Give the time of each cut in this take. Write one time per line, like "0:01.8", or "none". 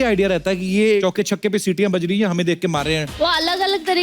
0:01.0
0:03.2